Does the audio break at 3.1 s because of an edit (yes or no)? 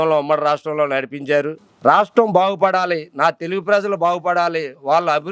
no